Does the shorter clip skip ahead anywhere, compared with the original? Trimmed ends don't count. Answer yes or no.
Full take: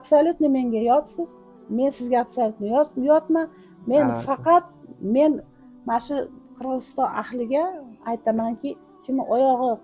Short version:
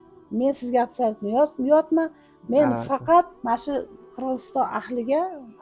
yes